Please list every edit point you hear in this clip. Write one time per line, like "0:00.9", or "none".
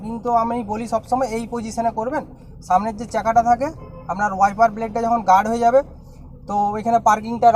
none